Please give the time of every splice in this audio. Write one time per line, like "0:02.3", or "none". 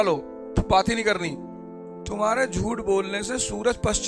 0:02.0